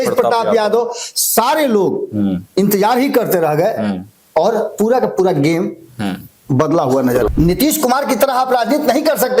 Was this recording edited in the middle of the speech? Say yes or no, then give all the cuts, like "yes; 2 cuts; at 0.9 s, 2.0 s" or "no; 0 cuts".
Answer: yes; 1 cut; at 7.3 s